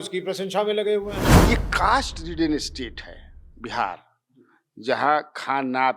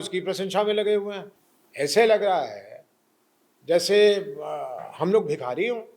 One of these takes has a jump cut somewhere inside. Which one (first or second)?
first